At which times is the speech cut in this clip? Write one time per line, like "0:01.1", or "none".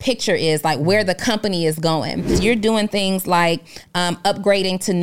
0:02.4